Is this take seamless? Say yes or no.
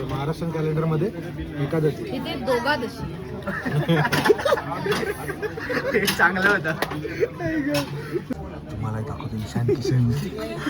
no